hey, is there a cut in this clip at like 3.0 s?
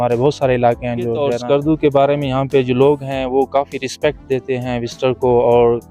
no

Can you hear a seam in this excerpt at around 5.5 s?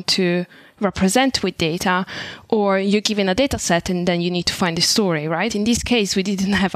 yes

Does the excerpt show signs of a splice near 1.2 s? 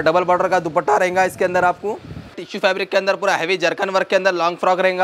no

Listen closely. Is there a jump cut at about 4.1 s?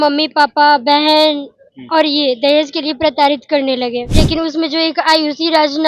yes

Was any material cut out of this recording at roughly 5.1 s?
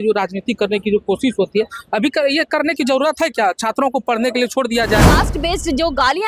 yes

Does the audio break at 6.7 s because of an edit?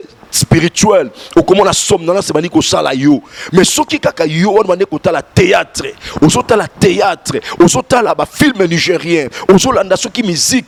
no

